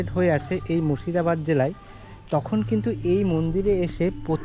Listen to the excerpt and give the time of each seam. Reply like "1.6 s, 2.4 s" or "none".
none